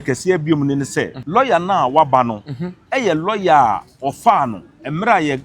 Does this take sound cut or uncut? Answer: cut